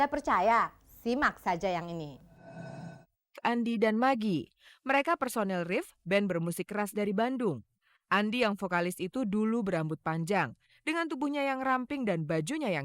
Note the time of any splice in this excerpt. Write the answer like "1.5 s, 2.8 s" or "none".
3.0 s